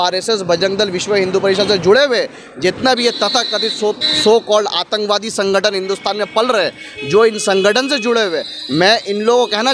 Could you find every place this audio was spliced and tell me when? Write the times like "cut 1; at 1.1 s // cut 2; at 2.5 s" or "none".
none

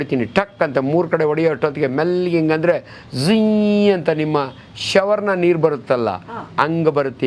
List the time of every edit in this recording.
none

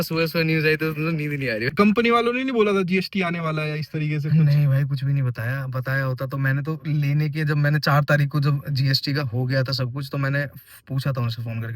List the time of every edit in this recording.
cut 1; at 1.7 s

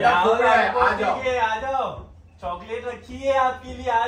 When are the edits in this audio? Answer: none

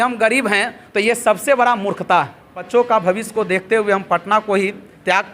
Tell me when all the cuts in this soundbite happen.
cut 1; at 2.7 s

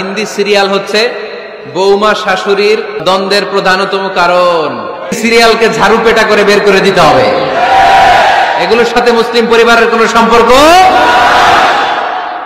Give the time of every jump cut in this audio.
cut 1; at 3.0 s // cut 2; at 5.2 s

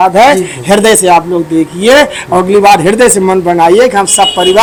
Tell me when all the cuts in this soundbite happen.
none

